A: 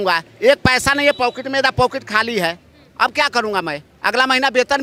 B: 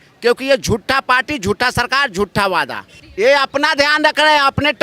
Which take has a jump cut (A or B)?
B